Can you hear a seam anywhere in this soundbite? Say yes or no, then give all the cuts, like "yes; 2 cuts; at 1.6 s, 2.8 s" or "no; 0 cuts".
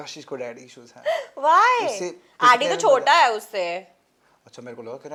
no; 0 cuts